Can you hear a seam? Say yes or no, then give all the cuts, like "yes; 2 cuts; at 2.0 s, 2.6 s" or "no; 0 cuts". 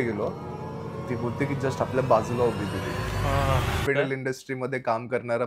yes; 1 cut; at 3.8 s